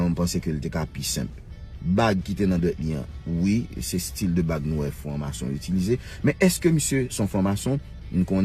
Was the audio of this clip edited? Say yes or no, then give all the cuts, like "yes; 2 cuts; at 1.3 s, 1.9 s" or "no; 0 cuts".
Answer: no; 0 cuts